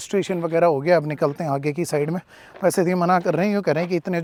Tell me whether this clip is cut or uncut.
uncut